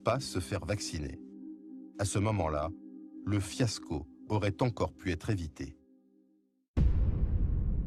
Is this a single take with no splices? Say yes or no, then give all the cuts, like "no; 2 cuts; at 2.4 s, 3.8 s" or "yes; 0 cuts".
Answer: yes; 0 cuts